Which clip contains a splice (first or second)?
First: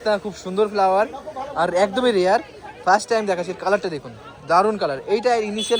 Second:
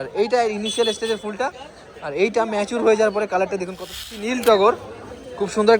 second